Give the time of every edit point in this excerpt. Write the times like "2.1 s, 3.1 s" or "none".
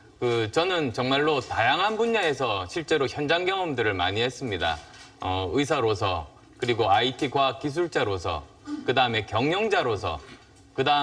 2.7 s